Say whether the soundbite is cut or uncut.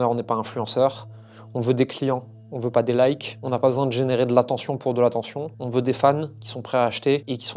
uncut